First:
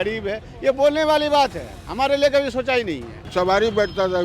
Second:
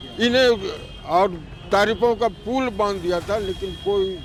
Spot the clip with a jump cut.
first; 1 cut; at 3.3 s

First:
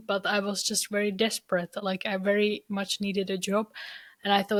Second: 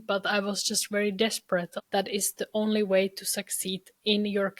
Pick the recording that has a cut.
second; 1 cut; at 1.7 s

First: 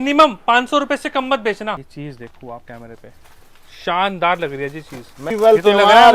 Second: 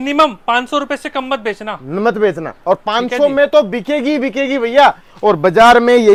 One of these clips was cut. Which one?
first; 2 cuts; at 1.8 s, 5.2 s

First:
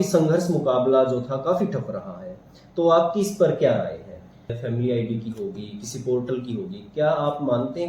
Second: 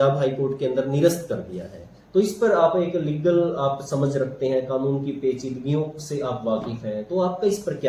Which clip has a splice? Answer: first; 1 cut; at 4.6 s

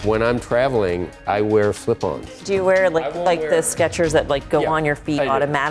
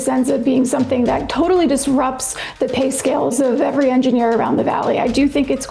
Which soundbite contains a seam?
first; 2 cuts; at 1.1 s, 2.4 s

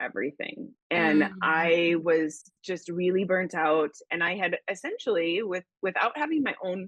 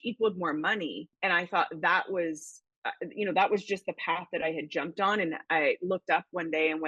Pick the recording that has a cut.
second; 1 cut; at 1.1 s

